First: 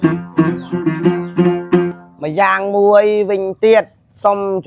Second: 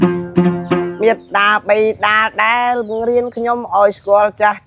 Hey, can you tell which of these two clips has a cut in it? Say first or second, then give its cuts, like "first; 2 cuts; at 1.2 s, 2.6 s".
first; 1 cut; at 2.0 s